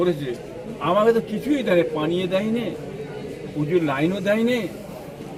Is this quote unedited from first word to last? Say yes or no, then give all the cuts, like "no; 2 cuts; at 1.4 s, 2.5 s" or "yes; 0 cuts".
yes; 0 cuts